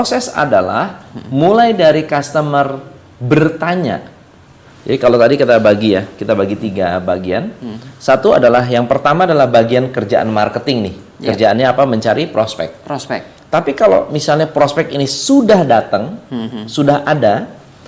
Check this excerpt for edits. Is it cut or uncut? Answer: uncut